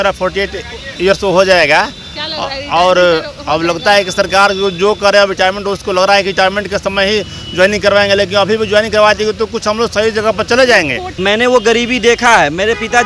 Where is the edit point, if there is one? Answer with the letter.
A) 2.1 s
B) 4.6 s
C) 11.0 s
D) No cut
C